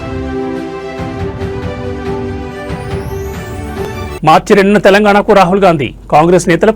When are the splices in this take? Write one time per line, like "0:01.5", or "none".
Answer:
0:03.8